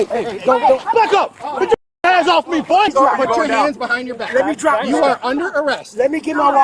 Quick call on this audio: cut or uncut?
cut